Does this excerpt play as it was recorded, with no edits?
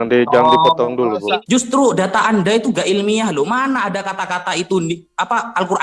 no; 1 cut; at 1.4 s

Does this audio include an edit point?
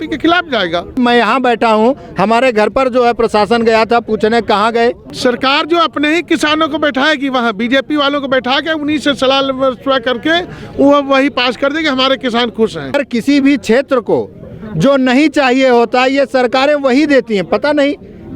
yes; 3 cuts; at 1.0 s, 5.1 s, 12.9 s

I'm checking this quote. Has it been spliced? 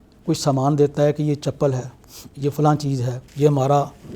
yes; 1 cut; at 3.2 s

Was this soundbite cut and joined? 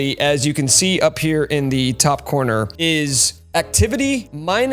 yes; 1 cut; at 2.7 s

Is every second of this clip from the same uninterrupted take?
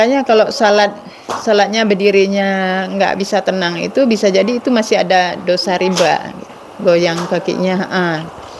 no; 1 cut; at 6.6 s

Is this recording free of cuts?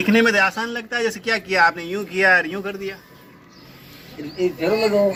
yes; 0 cuts

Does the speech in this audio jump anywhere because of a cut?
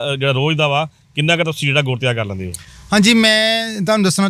no; 0 cuts

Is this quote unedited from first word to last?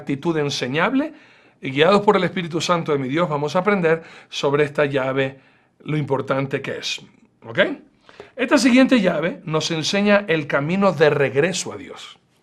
yes; 0 cuts

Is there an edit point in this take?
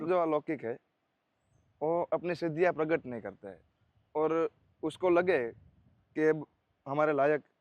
no; 0 cuts

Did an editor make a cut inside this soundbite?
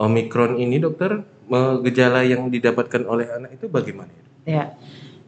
no; 0 cuts

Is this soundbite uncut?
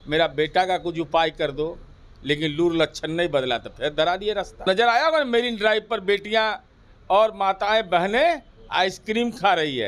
no; 1 cut; at 4.6 s

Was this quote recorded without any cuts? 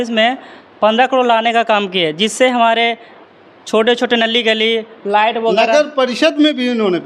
yes; 0 cuts

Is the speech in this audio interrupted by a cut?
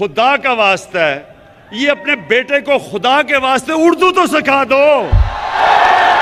no; 0 cuts

